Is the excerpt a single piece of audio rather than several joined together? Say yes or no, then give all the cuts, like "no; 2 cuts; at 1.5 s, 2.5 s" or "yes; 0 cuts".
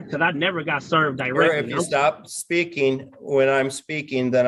yes; 0 cuts